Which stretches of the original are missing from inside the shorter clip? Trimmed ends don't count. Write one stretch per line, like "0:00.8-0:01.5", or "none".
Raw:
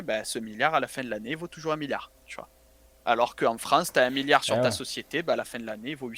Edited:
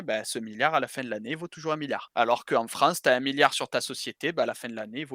0:02.1-0:03.0